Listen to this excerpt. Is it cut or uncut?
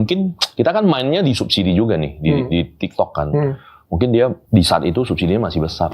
cut